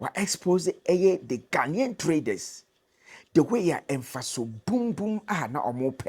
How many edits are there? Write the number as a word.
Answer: zero